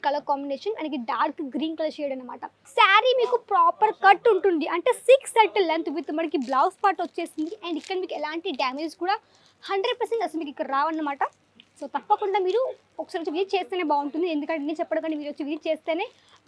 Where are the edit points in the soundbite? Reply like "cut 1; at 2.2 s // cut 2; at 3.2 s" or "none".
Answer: cut 1; at 2.6 s